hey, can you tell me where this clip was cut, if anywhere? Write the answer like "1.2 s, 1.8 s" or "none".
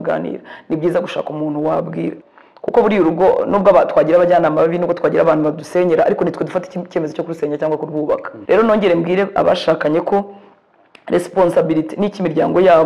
2.2 s, 8.3 s